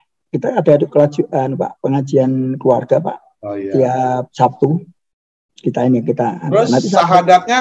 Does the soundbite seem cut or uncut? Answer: uncut